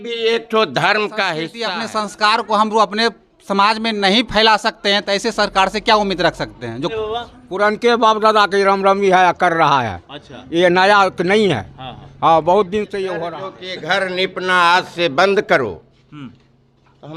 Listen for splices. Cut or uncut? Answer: cut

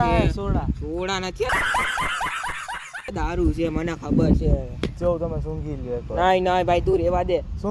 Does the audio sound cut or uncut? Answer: uncut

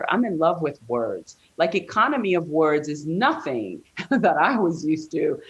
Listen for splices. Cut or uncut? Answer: uncut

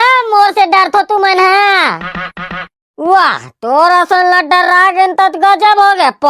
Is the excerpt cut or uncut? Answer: uncut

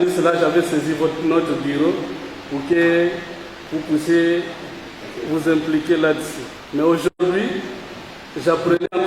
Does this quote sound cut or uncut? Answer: uncut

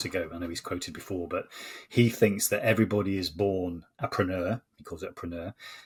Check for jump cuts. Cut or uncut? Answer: uncut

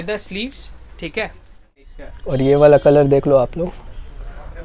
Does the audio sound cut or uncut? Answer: cut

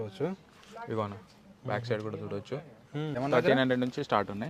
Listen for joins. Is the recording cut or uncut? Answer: cut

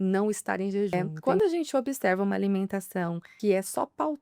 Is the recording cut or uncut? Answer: cut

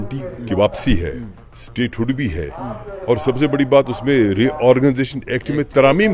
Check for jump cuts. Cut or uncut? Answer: uncut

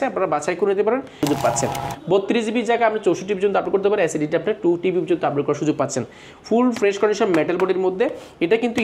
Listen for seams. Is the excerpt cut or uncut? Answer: cut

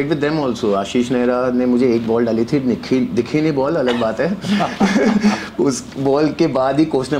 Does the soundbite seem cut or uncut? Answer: uncut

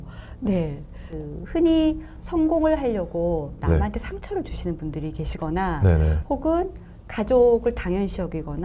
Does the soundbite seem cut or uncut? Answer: cut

